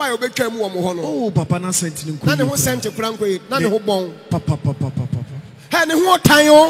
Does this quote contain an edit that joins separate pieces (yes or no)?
no